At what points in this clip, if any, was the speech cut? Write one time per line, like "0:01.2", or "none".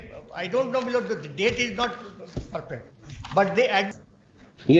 0:03.9